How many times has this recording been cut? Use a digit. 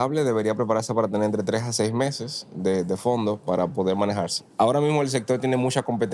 1